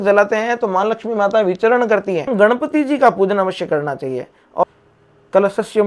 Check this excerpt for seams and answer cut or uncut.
cut